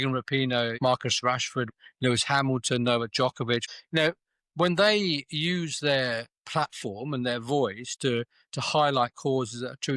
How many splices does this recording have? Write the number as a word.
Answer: three